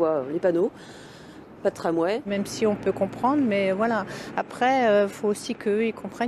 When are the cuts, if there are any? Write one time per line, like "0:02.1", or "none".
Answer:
0:02.2